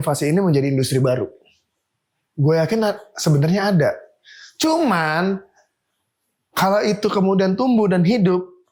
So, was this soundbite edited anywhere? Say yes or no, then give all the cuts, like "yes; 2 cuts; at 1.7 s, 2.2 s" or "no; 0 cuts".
no; 0 cuts